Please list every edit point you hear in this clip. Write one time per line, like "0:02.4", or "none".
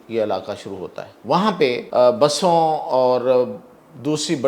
0:01.1
0:01.8